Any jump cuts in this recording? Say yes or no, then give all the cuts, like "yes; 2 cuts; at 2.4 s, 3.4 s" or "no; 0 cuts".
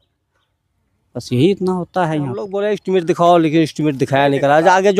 yes; 1 cut; at 2.5 s